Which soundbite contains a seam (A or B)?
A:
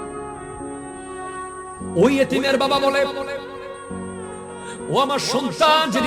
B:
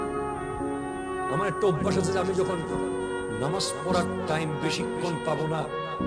A